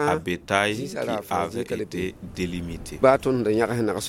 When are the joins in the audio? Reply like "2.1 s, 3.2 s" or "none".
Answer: 3.0 s